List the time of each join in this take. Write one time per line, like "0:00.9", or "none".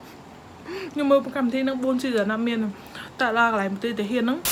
none